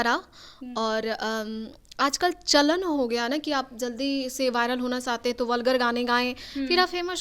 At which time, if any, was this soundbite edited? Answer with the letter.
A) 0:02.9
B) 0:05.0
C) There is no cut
C